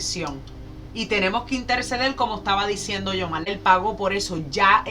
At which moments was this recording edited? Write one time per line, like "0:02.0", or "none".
0:03.5